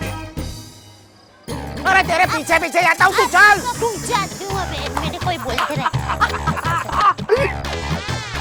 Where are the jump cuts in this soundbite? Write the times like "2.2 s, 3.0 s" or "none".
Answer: none

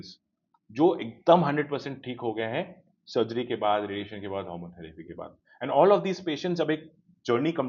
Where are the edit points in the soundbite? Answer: none

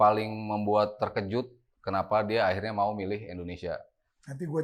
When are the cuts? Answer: none

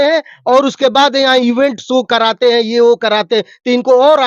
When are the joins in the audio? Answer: none

